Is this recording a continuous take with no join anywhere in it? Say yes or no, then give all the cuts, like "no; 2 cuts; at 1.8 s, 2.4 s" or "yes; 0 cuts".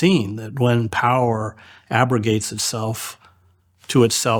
yes; 0 cuts